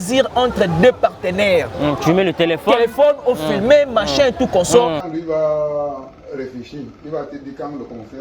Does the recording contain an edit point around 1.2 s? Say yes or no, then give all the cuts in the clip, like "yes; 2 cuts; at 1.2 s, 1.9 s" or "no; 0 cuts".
no; 1 cut; at 5.1 s